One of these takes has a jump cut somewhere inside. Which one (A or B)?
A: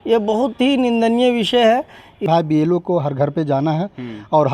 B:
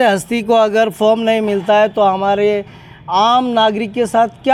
A